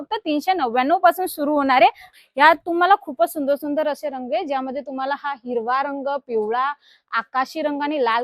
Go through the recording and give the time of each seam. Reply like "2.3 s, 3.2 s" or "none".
2.1 s